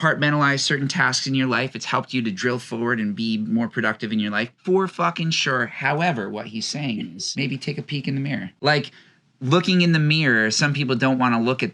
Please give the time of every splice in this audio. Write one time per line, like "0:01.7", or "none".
0:07.2
0:08.5